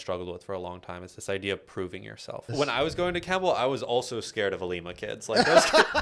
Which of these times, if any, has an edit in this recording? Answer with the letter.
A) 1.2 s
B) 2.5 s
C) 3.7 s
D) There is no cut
B